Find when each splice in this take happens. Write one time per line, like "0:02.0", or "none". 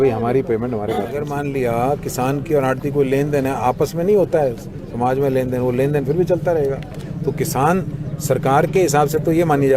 0:01.2